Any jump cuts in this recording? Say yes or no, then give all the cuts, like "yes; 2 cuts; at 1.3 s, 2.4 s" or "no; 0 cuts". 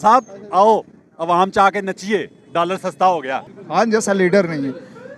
yes; 1 cut; at 3.5 s